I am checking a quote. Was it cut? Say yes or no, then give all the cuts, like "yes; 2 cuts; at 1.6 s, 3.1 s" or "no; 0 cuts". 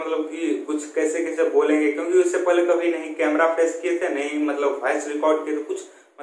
no; 0 cuts